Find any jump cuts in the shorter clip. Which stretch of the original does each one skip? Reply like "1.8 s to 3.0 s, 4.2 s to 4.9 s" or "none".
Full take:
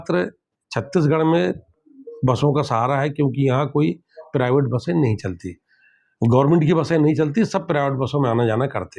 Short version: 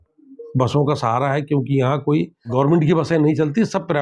4.2 s to 6.3 s